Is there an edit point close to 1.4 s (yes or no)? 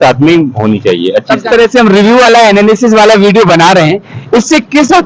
yes